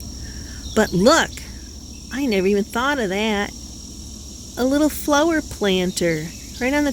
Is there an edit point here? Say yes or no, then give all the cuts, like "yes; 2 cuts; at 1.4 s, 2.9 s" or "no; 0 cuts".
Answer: yes; 1 cut; at 5.5 s